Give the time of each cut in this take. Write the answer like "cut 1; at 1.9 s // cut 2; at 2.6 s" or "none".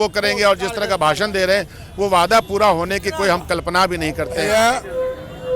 cut 1; at 4.4 s

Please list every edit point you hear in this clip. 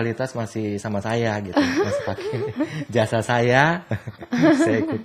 none

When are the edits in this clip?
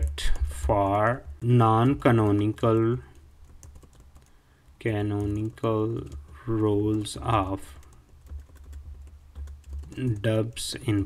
cut 1; at 1.4 s

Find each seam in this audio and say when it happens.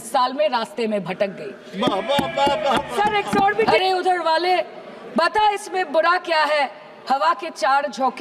cut 1; at 3.7 s

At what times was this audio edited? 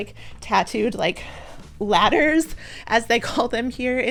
none

